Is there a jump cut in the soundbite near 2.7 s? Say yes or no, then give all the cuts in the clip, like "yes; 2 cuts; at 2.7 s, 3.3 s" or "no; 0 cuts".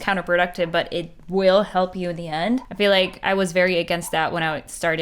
yes; 1 cut; at 2.7 s